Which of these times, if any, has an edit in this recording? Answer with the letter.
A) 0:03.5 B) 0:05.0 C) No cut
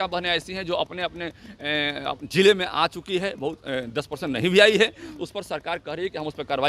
C